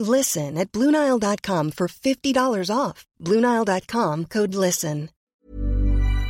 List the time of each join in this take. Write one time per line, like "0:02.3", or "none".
0:05.2